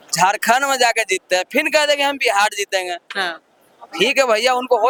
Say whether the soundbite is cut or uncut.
uncut